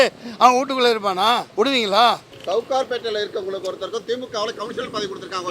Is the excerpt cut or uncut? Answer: cut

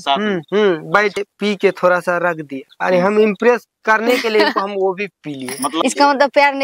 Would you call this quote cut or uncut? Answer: cut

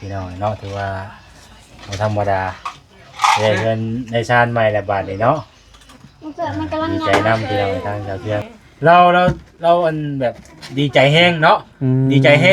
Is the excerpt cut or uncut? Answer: cut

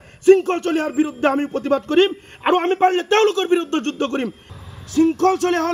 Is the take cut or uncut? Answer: cut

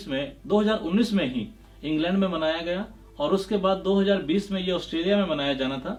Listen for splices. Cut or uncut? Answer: uncut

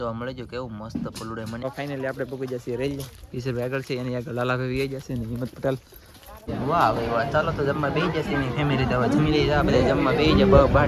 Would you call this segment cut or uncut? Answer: cut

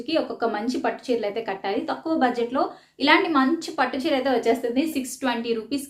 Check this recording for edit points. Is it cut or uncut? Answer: cut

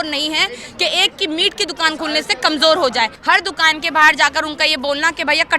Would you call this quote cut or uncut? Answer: cut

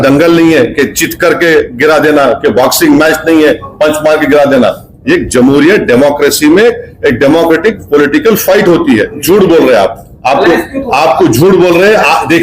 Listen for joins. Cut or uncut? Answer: cut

